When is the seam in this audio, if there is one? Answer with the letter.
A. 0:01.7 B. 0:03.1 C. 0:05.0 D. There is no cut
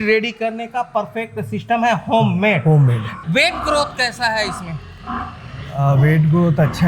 B